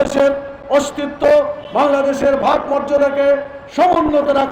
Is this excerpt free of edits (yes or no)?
yes